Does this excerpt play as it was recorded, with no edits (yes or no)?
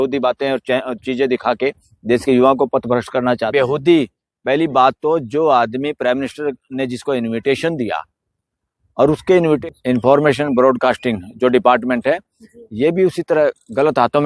no